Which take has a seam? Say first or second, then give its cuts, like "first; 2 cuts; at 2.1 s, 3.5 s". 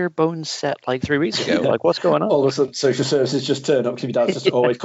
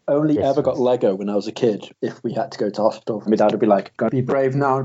second; 3 cuts; at 1.9 s, 3.2 s, 3.9 s